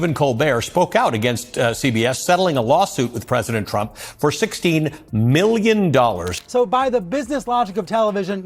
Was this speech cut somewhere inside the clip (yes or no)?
yes